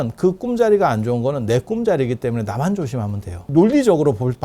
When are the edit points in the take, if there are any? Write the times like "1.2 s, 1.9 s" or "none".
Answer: 3.5 s

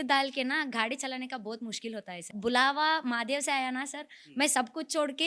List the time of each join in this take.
2.3 s

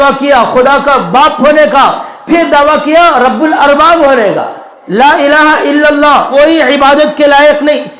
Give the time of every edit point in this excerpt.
4.8 s, 6.3 s

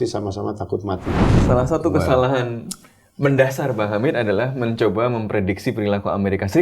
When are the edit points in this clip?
1.3 s

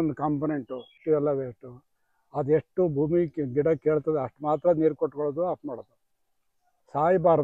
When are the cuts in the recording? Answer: 1.0 s

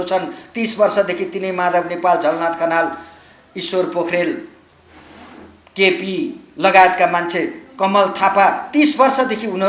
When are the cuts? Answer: none

